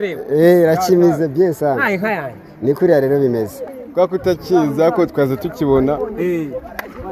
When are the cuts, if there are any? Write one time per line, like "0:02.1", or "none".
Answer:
0:03.7